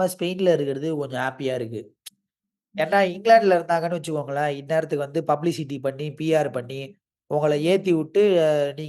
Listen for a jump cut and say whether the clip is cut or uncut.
uncut